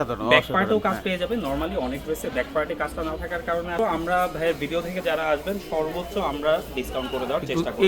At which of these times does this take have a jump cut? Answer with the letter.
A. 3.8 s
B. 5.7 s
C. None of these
A